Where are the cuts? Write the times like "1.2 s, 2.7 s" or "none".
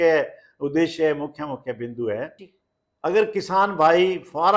2.5 s